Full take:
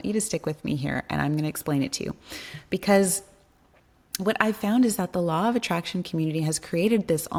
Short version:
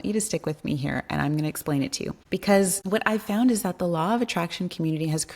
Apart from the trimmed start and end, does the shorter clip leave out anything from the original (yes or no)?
yes